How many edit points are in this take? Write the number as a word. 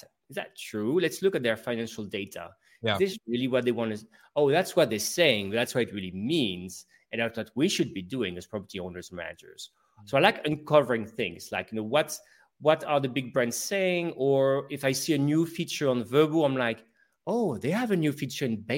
zero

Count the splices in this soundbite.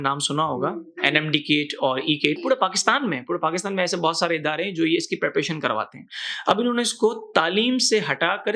one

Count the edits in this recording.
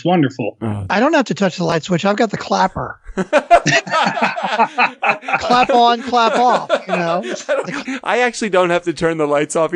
three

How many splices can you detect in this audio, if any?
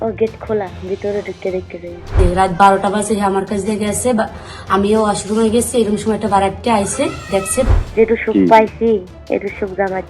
two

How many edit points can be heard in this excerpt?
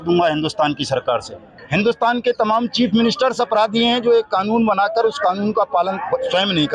one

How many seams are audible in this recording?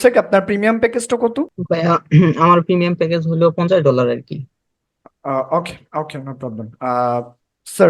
one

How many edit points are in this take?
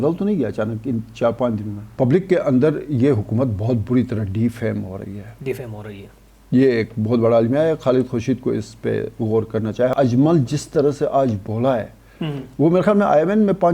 two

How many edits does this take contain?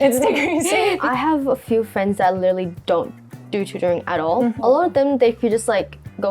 two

